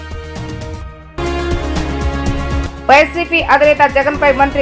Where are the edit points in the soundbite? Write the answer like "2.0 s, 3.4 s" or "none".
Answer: 1.1 s, 2.6 s